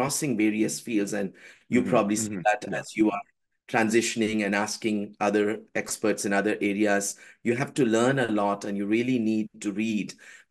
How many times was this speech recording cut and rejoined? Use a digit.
0